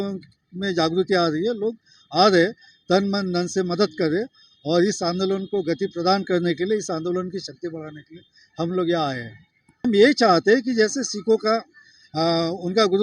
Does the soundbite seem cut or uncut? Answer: cut